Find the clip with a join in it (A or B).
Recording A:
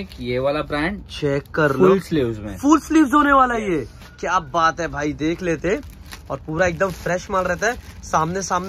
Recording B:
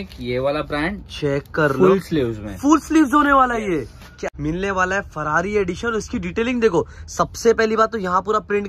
B